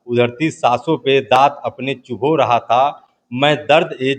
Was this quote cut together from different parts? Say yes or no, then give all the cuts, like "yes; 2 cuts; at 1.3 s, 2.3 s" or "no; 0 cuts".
no; 0 cuts